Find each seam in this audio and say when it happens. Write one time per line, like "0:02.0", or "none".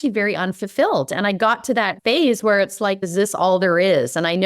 0:01.9
0:03.0